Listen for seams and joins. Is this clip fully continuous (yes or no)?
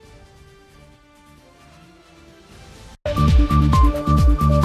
no